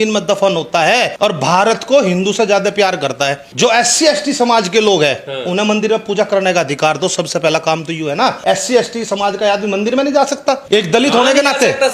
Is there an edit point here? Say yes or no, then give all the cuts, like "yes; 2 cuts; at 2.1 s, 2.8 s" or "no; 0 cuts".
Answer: yes; 4 cuts; at 1.1 s, 3.4 s, 8.4 s, 10.6 s